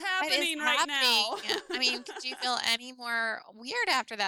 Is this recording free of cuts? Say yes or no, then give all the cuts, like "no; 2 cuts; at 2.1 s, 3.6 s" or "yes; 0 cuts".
yes; 0 cuts